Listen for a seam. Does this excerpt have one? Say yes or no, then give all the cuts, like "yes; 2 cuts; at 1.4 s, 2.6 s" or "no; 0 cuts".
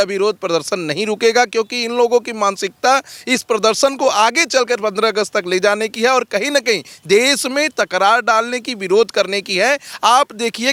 no; 0 cuts